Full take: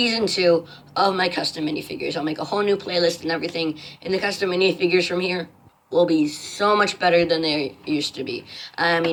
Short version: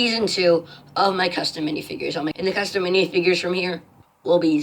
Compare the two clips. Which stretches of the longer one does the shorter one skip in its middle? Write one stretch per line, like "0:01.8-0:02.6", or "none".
0:02.3-0:04.0